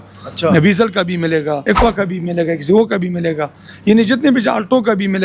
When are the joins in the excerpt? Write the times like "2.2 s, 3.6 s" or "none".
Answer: 1.6 s